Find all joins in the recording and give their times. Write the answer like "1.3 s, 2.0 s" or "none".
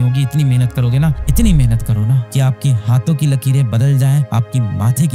none